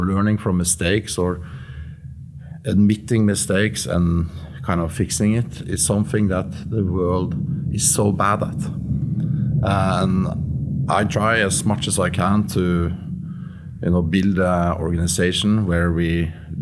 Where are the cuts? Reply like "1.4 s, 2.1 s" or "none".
none